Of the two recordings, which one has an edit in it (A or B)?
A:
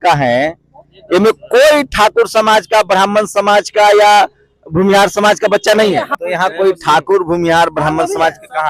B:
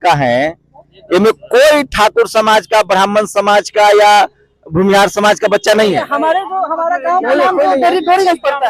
A